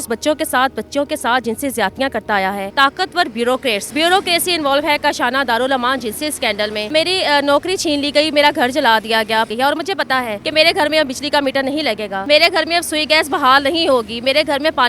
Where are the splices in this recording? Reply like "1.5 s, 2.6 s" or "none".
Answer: 2.7 s, 3.8 s, 6.9 s, 9.5 s, 10.4 s, 12.1 s